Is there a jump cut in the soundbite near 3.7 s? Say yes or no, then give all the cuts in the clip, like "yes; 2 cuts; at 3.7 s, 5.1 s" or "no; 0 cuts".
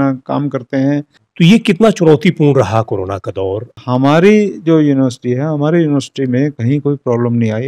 yes; 2 cuts; at 1.2 s, 3.7 s